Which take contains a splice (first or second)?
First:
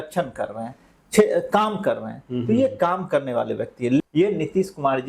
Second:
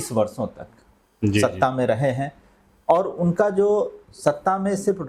first